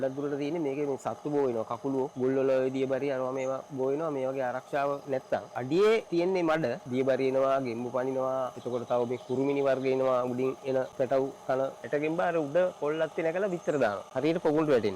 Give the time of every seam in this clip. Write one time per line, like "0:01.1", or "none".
0:02.1
0:05.5
0:06.6
0:08.6
0:10.9
0:11.8
0:14.1